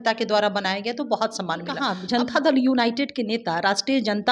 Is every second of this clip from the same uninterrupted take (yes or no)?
no